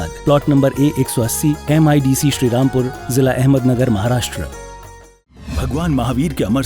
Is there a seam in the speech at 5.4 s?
yes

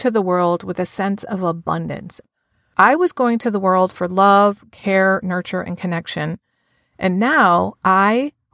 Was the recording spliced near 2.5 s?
yes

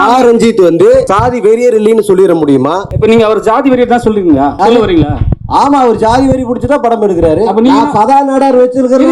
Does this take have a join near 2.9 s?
yes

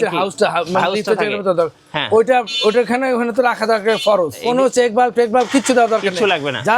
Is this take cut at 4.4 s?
yes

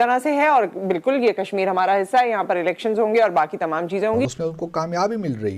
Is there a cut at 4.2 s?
yes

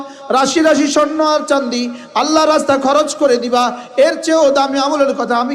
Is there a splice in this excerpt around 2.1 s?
no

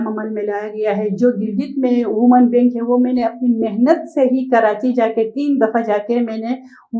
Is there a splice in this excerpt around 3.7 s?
no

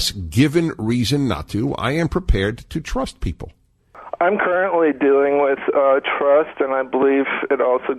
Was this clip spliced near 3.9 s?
yes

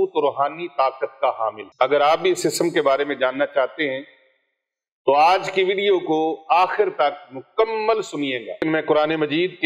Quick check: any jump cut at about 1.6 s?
yes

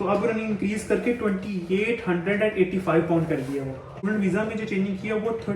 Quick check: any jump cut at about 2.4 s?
no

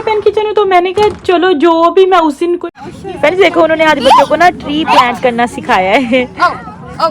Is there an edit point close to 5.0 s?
no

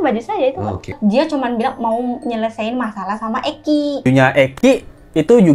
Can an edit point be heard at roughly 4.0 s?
yes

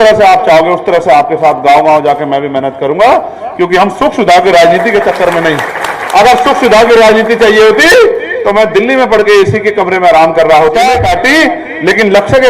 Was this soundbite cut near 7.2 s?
no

